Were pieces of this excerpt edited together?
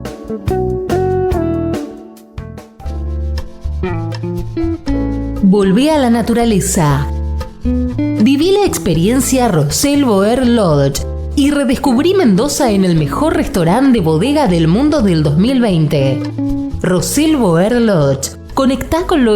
yes; 1 cut; at 2.6 s

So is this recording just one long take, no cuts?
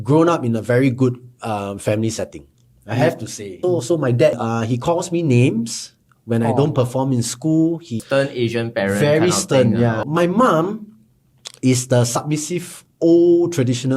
no; 4 cuts; at 3.4 s, 4.4 s, 8.0 s, 10.0 s

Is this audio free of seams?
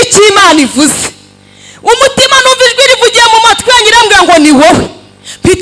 yes; 0 cuts

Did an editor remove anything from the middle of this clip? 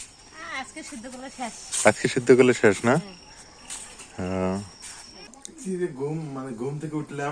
yes; 1 cut; at 5.5 s

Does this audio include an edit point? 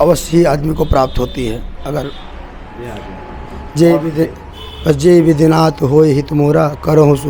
yes; 1 cut; at 2.3 s

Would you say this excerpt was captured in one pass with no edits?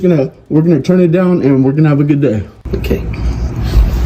no; 1 cut; at 2.6 s

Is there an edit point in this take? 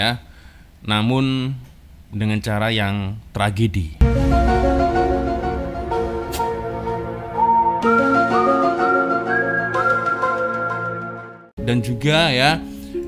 yes; 1 cut; at 11.5 s

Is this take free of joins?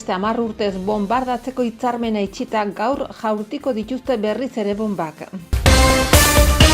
no; 1 cut; at 5.5 s

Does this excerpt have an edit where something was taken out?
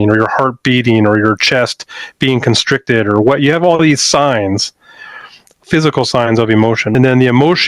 yes; 2 cuts; at 5.6 s, 6.9 s

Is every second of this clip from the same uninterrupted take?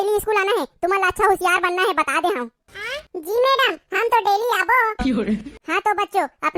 yes; 0 cuts

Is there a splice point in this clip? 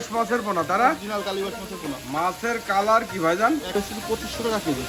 yes; 1 cut; at 3.7 s

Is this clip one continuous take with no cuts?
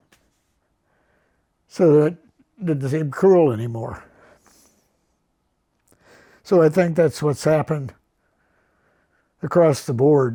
yes; 0 cuts

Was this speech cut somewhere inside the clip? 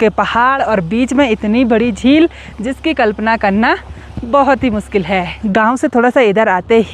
no; 0 cuts

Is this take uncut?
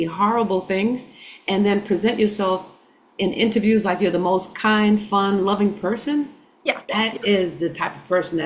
yes; 0 cuts

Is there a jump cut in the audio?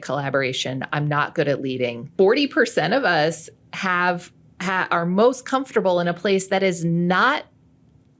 yes; 1 cut; at 2.0 s

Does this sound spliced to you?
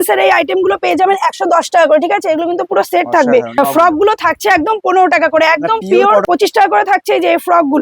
yes; 2 cuts; at 3.6 s, 6.3 s

